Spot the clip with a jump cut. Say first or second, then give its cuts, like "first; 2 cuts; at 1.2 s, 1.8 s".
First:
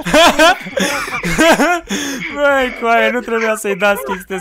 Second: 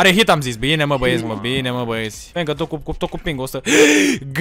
second; 1 cut; at 2.2 s